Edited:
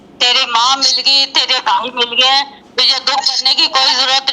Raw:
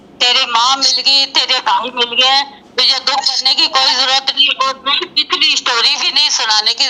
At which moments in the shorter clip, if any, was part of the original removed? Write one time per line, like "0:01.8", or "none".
none